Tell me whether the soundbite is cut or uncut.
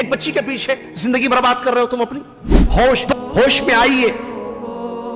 cut